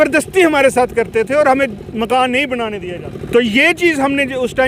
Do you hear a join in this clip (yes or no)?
yes